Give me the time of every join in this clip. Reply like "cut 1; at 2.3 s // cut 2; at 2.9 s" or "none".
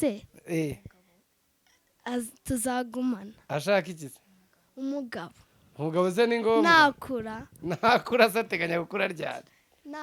none